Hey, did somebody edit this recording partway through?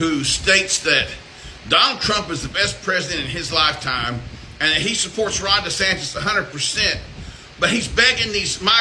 no; 0 cuts

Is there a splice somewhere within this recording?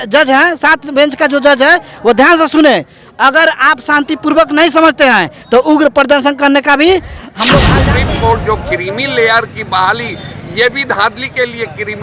yes; 1 cut; at 7.6 s

